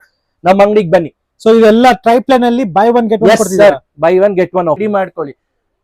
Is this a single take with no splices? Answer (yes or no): no